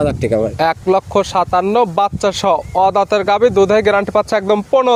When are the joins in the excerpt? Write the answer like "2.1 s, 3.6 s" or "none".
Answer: none

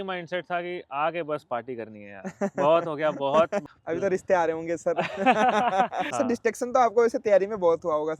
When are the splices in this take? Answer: 3.7 s, 6.0 s

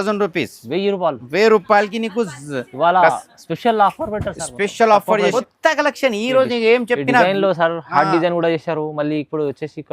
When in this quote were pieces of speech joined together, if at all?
5.3 s

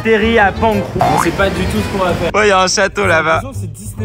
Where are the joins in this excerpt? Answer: 0.9 s, 2.3 s

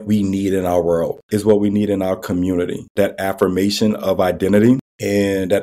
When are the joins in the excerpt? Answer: none

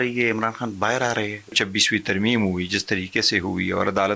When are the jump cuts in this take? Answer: 1.6 s

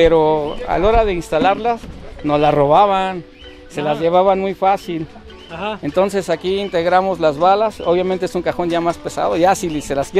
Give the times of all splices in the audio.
none

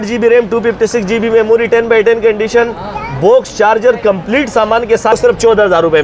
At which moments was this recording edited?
5.1 s

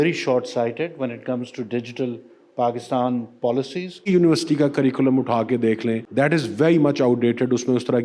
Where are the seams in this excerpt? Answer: 4.1 s, 6.0 s

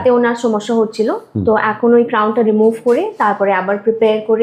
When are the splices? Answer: none

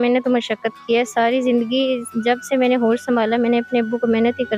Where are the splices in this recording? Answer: none

